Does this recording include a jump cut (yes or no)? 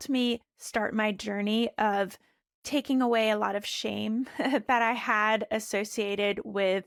no